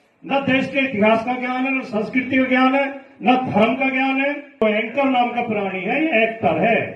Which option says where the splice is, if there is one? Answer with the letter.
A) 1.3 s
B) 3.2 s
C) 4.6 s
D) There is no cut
C